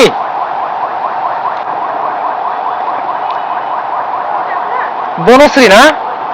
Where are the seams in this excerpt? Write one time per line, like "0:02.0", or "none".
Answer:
0:01.7